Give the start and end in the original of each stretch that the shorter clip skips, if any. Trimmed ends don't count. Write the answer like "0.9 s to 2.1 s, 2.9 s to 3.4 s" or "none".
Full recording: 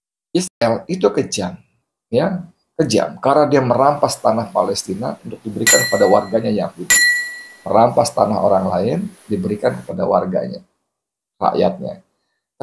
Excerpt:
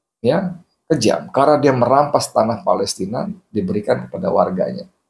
5.3 s to 9.1 s